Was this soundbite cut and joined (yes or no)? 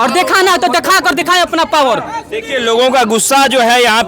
no